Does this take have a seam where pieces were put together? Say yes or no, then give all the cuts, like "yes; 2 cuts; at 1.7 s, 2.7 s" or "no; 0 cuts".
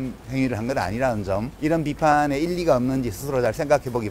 yes; 1 cut; at 1.5 s